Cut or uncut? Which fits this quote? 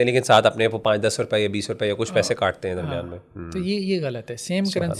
uncut